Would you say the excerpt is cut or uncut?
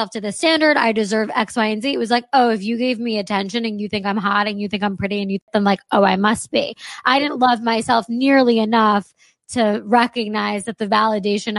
cut